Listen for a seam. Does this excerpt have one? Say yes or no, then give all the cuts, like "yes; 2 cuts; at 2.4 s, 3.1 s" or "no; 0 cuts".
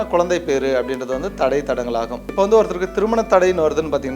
yes; 1 cut; at 2.3 s